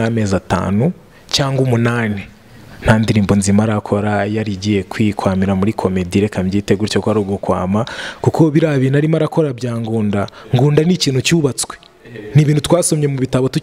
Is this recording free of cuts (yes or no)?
yes